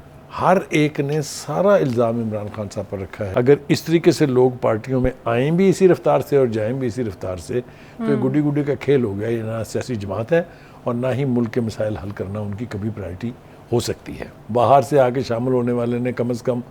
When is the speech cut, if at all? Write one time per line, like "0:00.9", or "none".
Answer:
0:03.2
0:14.3